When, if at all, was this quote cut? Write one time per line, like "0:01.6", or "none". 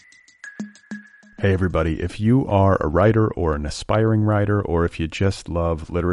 0:01.0